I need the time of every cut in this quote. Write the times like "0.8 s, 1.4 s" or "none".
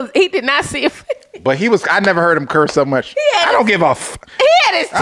none